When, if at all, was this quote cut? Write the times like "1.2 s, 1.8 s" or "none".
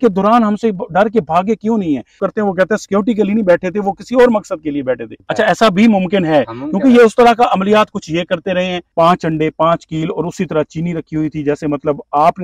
2.2 s, 5.2 s, 8.9 s